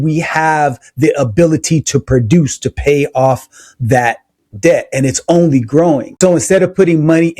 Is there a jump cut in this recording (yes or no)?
yes